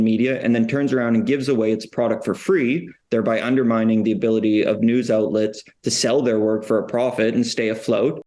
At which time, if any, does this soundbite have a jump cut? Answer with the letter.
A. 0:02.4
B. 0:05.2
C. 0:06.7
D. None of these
D